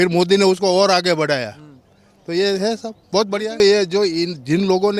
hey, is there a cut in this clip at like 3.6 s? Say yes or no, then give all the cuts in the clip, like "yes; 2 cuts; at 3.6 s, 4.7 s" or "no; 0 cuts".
yes; 1 cut; at 3.6 s